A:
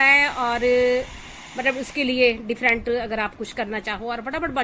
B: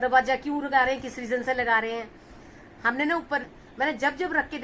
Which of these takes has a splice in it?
B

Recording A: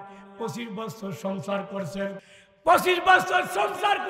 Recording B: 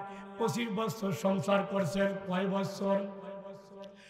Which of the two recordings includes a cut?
A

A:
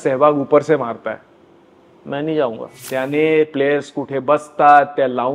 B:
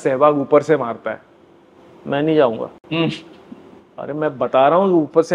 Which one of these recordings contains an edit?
A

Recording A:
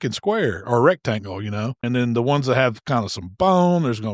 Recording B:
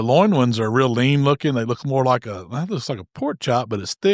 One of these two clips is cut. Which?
A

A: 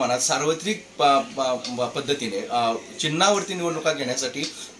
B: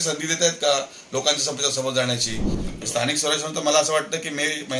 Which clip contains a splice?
B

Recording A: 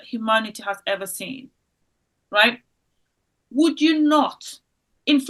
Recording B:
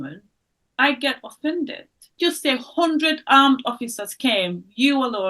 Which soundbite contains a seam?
B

